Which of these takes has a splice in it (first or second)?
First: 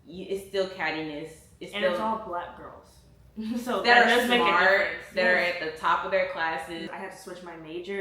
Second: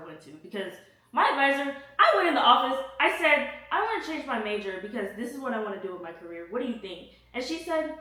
first